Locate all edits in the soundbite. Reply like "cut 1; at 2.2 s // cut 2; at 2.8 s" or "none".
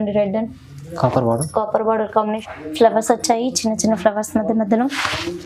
cut 1; at 2.4 s

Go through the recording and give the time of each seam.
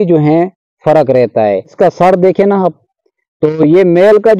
cut 1; at 1.7 s

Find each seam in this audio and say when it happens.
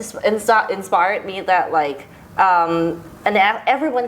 none

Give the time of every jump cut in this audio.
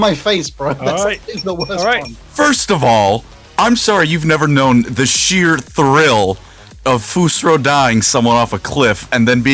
cut 1; at 2.2 s

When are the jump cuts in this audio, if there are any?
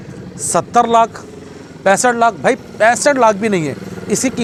none

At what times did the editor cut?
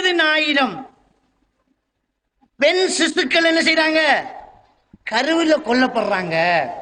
none

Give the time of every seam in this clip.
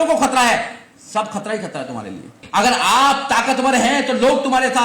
cut 1; at 2.4 s

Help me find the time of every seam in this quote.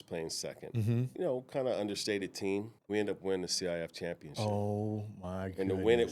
cut 1; at 1.1 s // cut 2; at 2.8 s

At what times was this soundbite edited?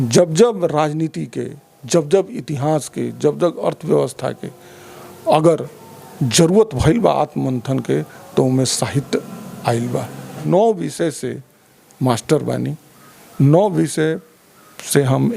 cut 1; at 10.4 s

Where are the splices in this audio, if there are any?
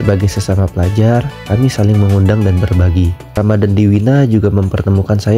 cut 1; at 3.2 s

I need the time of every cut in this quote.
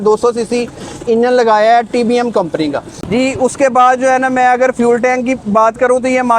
cut 1; at 3.0 s

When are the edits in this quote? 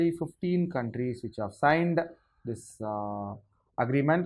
none

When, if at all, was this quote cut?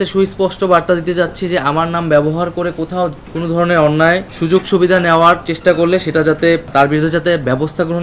cut 1; at 3.3 s // cut 2; at 4.3 s // cut 3; at 6.7 s

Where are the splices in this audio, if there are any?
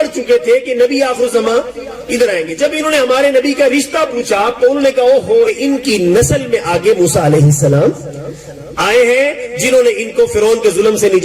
cut 1; at 5.5 s

